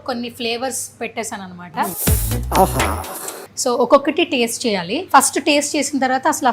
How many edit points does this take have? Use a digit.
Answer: 3